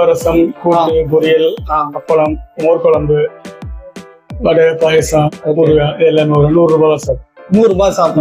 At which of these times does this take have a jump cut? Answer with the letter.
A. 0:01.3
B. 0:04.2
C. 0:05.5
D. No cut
D